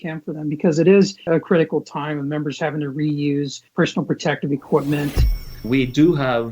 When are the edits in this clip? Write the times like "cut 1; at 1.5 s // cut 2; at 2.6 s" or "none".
cut 1; at 5.4 s